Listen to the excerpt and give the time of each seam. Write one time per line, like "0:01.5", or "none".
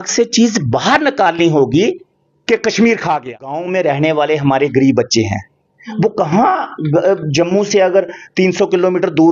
0:03.7